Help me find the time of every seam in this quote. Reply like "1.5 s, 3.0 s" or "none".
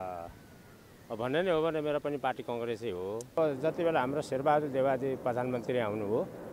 3.2 s